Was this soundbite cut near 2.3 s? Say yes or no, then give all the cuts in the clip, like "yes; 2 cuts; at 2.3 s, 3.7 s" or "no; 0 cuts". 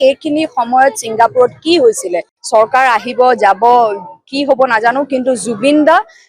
yes; 1 cut; at 2.3 s